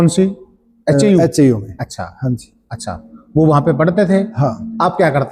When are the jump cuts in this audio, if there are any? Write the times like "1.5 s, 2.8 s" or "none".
none